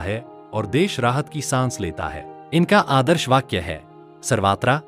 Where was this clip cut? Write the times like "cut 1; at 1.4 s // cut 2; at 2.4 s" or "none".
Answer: none